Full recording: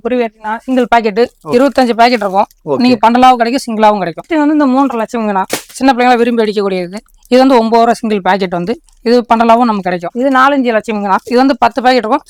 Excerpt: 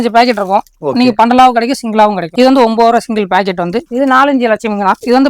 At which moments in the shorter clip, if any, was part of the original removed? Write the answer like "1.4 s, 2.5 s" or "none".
2.2 s, 3.9 s

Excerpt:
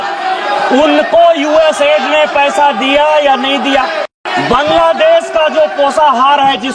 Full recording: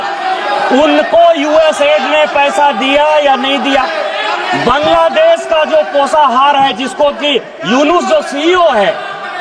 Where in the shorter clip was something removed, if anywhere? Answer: 4.2 s

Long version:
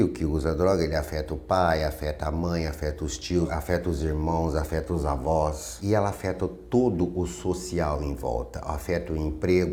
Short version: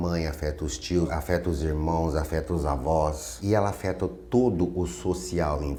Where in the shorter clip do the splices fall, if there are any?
none

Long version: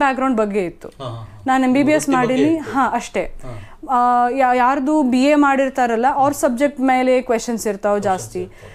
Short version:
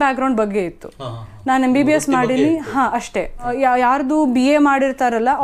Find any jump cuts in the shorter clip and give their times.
3.5 s

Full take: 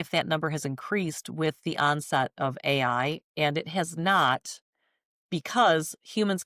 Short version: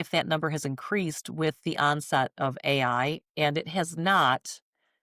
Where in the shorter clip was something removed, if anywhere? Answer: none

